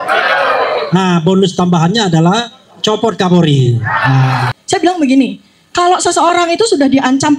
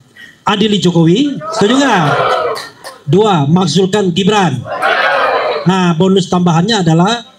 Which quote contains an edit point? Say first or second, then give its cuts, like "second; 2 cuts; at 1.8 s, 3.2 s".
first; 1 cut; at 4.5 s